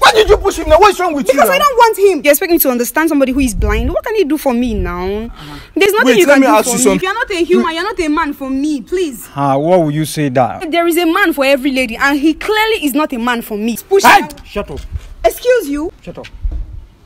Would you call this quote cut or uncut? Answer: cut